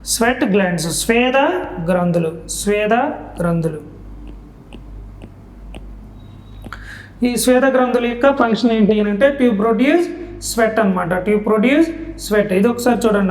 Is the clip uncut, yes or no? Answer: yes